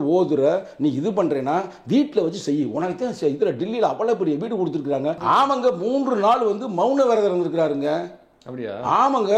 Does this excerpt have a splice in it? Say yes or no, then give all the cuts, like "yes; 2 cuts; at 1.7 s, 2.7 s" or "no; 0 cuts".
yes; 1 cut; at 5.2 s